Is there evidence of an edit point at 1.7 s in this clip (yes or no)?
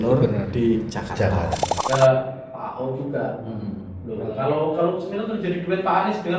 yes